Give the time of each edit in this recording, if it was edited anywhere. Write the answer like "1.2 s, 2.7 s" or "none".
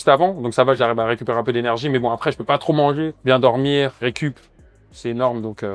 3.1 s, 3.9 s